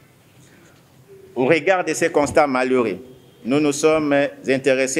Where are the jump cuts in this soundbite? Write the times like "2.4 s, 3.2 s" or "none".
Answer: none